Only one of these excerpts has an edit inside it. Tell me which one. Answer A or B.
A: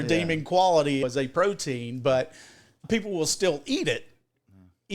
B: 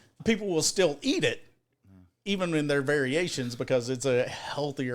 A